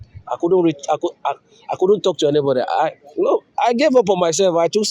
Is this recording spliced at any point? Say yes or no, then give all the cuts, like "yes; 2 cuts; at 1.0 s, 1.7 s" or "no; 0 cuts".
no; 0 cuts